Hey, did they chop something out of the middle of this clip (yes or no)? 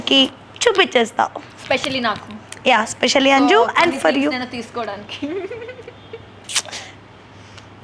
no